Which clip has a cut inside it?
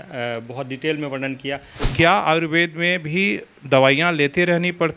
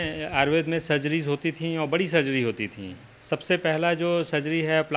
first; 1 cut; at 1.9 s

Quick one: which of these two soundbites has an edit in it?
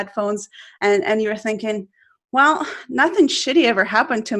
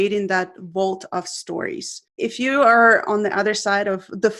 second; 1 cut; at 2.0 s

